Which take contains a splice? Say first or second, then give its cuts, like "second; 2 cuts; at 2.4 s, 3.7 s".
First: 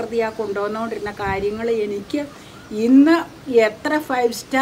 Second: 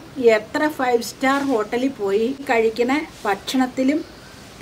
second; 1 cut; at 2.4 s